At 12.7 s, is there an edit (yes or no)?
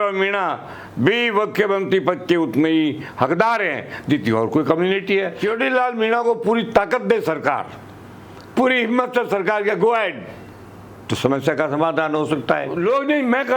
yes